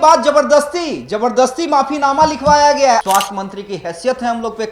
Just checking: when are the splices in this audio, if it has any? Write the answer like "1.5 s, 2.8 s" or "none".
3.0 s